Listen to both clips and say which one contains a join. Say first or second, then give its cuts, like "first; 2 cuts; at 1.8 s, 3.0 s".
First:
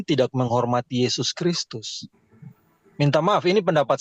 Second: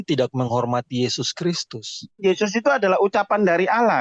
second; 1 cut; at 2.2 s